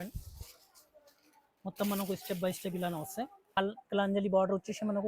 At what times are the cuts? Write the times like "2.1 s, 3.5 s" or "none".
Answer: 3.6 s